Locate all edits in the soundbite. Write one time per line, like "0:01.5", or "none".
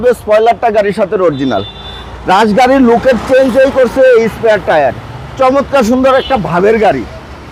none